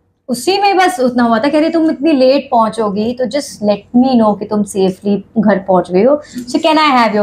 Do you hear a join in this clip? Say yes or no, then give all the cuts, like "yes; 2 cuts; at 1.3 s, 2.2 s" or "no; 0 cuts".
no; 0 cuts